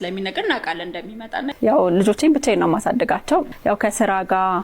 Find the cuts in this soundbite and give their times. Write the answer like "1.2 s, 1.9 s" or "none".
1.5 s